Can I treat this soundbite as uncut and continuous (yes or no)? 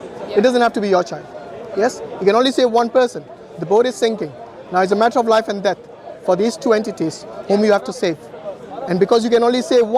yes